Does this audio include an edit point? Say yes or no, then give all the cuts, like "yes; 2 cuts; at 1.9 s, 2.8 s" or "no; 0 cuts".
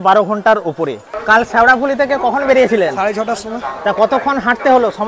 yes; 1 cut; at 1.1 s